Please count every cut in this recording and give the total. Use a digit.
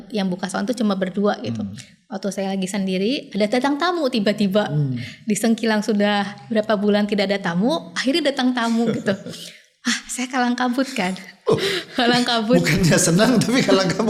0